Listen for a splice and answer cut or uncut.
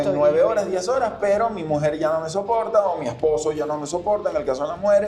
uncut